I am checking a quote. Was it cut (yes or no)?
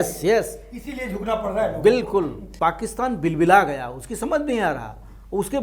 yes